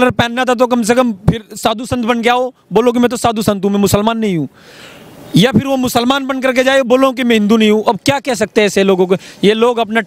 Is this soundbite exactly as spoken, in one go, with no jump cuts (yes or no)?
yes